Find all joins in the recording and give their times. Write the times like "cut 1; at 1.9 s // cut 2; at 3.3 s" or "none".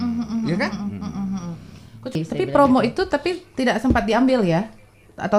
cut 1; at 2.1 s